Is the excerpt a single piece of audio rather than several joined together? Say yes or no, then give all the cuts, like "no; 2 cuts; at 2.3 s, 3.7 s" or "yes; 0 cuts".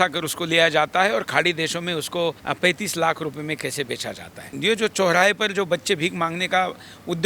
no; 2 cuts; at 2.4 s, 4.5 s